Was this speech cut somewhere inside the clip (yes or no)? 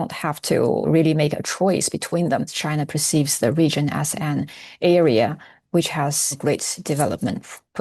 yes